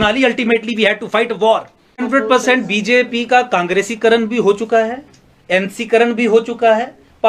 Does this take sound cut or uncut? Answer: cut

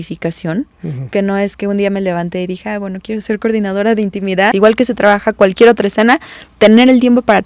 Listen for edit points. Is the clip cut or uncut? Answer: cut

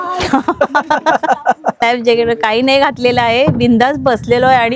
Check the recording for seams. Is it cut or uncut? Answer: cut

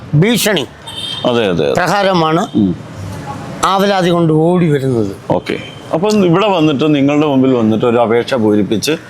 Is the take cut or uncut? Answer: uncut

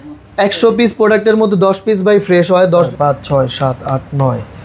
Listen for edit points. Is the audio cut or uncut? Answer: cut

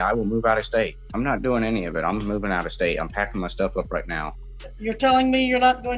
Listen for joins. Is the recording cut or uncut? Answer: cut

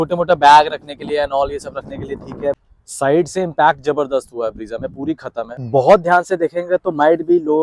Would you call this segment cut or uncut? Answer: cut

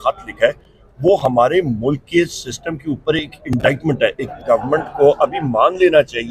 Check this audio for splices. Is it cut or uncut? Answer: cut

